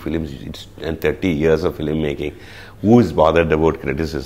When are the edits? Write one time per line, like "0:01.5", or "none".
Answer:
none

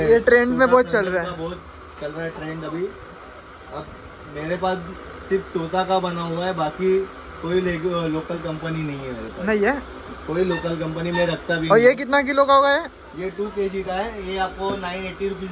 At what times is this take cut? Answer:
none

